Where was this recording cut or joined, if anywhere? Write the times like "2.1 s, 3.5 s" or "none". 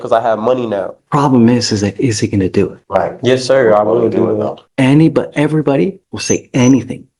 1.0 s, 2.8 s, 4.6 s, 6.1 s